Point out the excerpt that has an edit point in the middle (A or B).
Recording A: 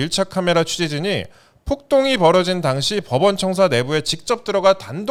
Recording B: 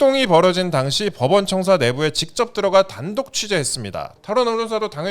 B